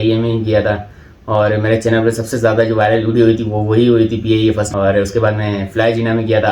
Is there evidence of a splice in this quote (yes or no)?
yes